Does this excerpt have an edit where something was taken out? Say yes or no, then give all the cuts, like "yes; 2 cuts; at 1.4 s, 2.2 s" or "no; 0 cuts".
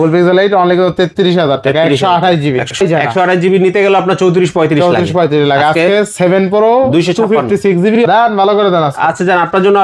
yes; 2 cuts; at 2.8 s, 8.0 s